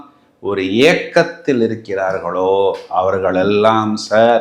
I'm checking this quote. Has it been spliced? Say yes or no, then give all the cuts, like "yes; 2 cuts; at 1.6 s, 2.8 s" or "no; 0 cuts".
no; 0 cuts